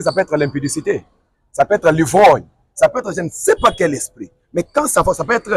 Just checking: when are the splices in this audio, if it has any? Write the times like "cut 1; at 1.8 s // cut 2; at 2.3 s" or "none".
none